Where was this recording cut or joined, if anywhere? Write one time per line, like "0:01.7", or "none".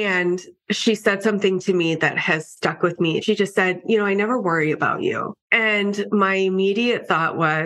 0:03.2